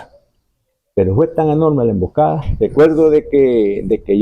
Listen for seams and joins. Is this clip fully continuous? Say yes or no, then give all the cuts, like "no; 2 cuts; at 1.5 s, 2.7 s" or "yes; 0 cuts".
no; 1 cut; at 2.5 s